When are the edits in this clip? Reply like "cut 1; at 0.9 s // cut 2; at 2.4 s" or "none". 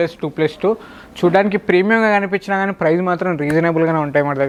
none